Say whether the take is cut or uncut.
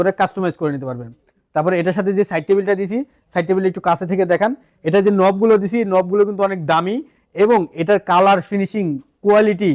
uncut